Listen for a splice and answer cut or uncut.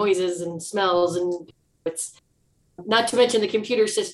uncut